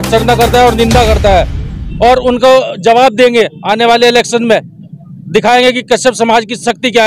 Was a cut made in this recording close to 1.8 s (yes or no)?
no